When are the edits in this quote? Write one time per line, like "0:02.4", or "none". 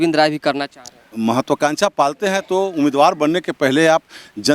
0:01.0